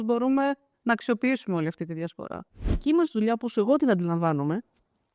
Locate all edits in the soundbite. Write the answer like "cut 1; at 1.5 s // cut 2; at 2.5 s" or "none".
cut 1; at 2.8 s